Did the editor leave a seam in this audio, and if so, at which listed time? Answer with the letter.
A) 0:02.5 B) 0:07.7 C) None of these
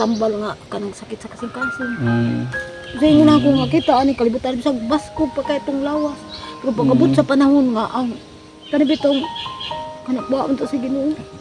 A